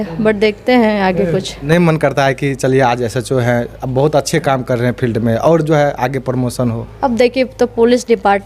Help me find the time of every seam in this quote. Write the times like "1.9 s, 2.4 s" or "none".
1.6 s